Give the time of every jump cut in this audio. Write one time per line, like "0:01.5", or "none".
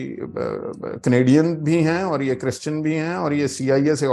none